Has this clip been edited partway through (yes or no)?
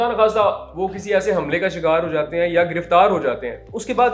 no